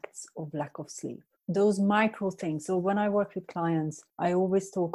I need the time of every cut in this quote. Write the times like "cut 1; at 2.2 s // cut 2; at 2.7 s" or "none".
cut 1; at 1.3 s // cut 2; at 4.0 s